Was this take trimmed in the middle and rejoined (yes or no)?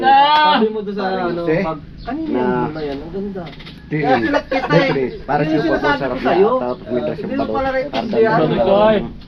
no